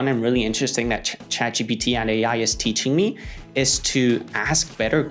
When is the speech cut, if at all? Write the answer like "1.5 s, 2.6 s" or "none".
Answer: none